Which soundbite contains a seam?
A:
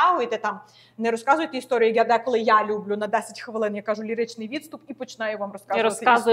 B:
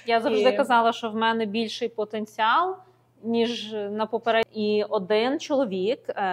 B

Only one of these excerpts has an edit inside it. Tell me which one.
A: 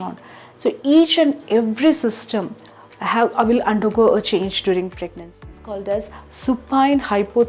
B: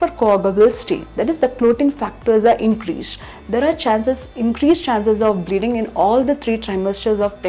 A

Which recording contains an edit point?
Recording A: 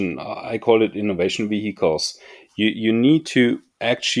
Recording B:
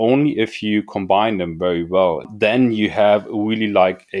B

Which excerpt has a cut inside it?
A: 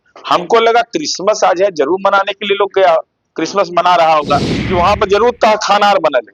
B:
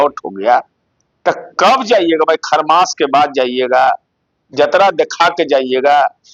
A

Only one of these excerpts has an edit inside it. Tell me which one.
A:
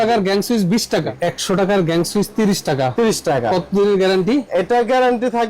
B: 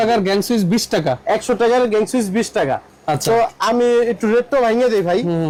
A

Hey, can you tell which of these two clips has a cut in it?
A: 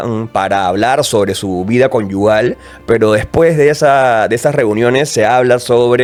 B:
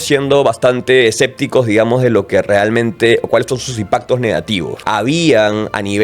B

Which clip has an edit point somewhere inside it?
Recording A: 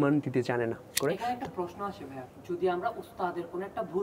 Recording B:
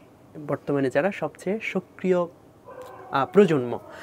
A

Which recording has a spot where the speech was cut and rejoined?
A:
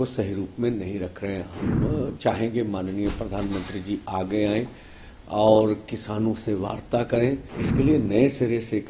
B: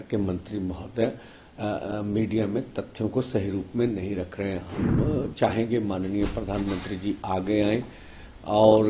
A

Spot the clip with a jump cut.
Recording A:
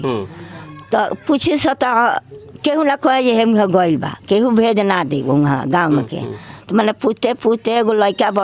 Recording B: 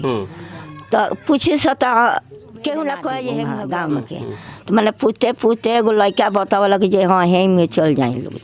B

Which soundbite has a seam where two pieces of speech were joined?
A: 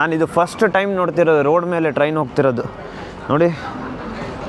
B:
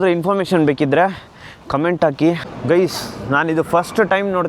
B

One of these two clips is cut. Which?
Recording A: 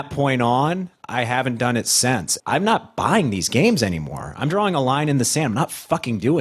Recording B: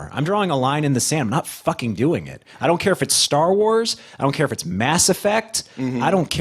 A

